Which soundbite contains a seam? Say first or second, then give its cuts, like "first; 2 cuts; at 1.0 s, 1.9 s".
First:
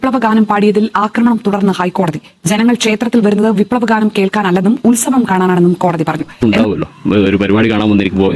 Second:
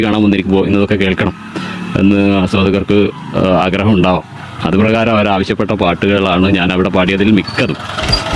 first; 1 cut; at 6.3 s